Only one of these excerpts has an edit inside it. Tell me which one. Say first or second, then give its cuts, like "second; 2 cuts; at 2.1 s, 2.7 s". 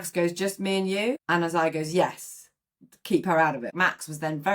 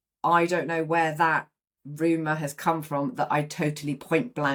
first; 2 cuts; at 1.2 s, 3.7 s